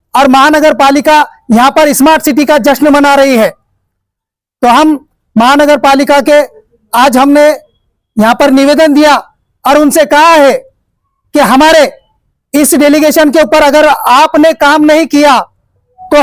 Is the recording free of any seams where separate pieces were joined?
yes; 0 cuts

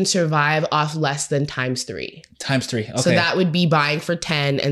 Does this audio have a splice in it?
no; 0 cuts

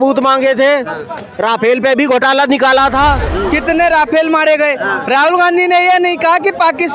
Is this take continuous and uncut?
no; 1 cut; at 3.3 s

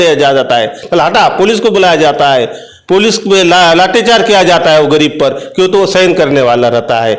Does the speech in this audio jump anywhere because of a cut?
no; 0 cuts

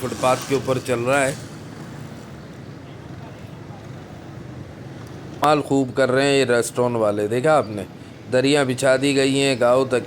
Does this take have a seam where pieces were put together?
yes; 1 cut; at 5.4 s

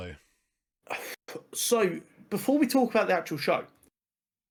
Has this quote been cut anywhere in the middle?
no; 0 cuts

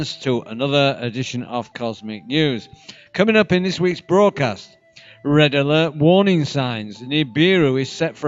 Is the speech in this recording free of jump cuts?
no; 1 cut; at 1.7 s

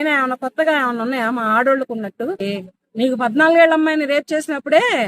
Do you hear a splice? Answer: yes; 1 cut; at 2.4 s

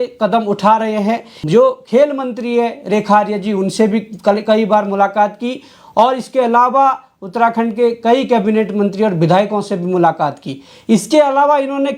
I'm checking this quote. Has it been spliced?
yes; 1 cut; at 1.3 s

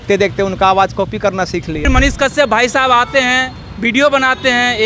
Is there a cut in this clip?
yes; 1 cut; at 1.9 s

